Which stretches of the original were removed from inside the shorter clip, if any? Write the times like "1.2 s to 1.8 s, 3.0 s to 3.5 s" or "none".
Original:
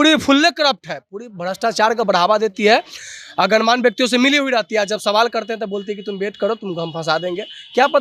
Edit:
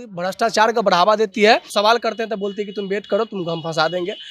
2.9 s to 5.0 s